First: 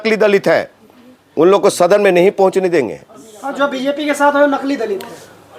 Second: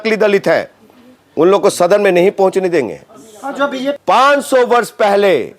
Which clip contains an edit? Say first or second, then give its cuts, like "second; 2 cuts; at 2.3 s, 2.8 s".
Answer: second; 1 cut; at 4.0 s